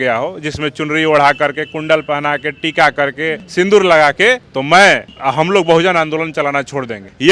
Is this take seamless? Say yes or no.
yes